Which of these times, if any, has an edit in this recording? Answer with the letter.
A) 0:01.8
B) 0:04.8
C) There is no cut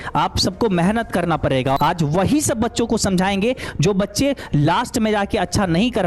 A